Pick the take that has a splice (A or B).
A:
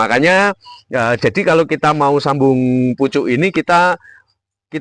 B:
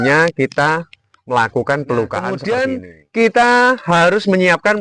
B